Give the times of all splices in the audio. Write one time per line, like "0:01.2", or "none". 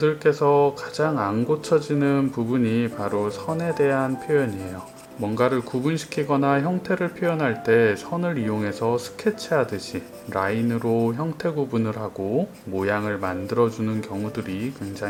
none